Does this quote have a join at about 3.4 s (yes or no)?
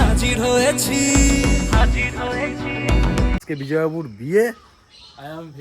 yes